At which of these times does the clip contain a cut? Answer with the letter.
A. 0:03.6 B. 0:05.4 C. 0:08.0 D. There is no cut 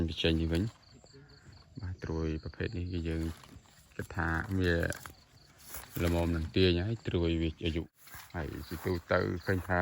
C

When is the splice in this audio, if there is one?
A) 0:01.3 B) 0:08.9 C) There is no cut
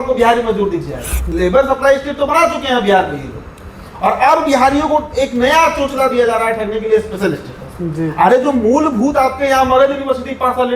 A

